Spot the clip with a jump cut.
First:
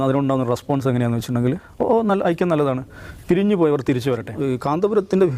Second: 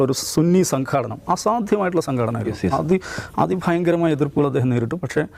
first; 1 cut; at 4.3 s

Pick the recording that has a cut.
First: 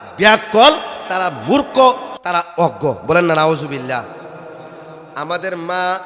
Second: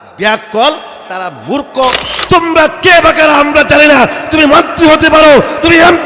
second; 1 cut; at 2.1 s

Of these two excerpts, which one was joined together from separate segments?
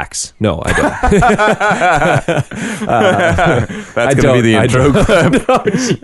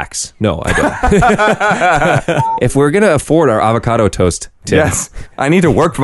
second; 1 cut; at 2.7 s

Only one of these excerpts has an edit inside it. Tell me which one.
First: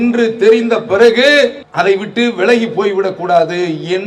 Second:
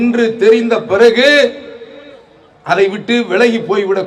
first; 1 cut; at 1.6 s

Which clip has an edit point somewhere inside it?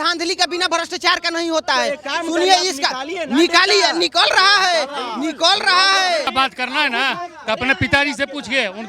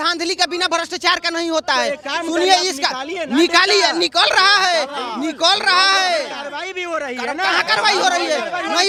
first; 1 cut; at 6.3 s

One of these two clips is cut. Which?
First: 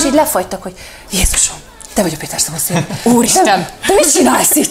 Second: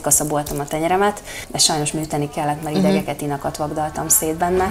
second; 1 cut; at 1.5 s

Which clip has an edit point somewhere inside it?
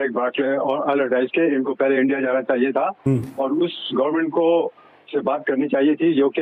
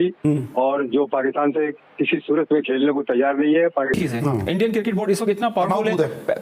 second; 1 cut; at 4.0 s

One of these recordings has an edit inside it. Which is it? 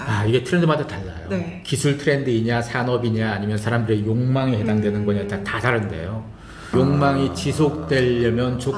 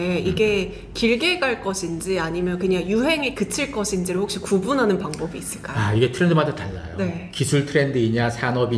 first; 1 cut; at 6.7 s

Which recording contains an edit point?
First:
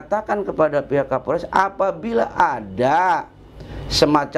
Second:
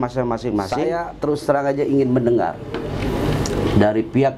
second; 1 cut; at 1.0 s

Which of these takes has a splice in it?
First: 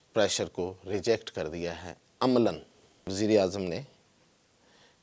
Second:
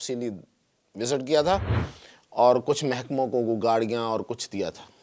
first; 1 cut; at 3.1 s

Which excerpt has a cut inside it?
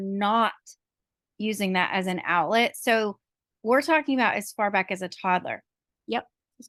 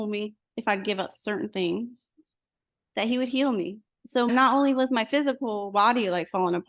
second; 1 cut; at 4.0 s

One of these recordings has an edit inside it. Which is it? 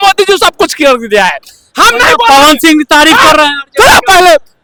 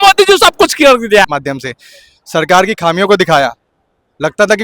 second; 1 cut; at 1.3 s

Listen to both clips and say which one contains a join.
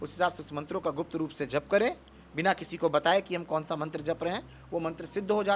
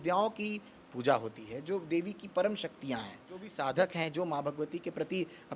second; 1 cut; at 3.5 s

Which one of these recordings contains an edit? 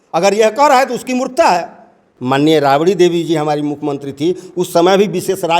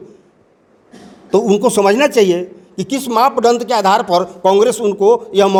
first; 1 cut; at 2.1 s

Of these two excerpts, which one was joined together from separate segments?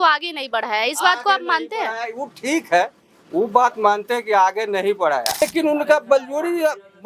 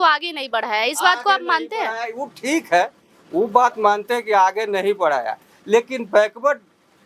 first; 1 cut; at 5.4 s

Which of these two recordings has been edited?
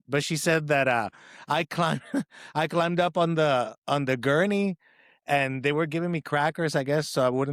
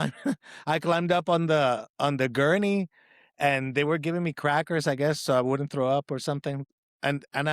second; 1 cut; at 6.6 s

